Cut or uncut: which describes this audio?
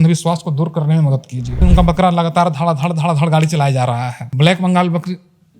cut